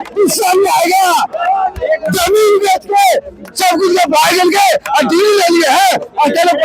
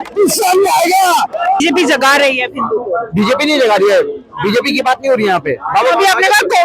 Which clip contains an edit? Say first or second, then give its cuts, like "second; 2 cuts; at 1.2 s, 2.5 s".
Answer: second; 1 cut; at 1.6 s